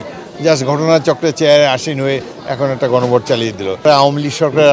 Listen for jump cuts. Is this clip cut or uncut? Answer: cut